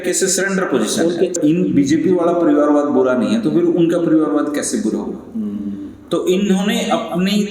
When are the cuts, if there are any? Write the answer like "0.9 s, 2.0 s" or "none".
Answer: 1.4 s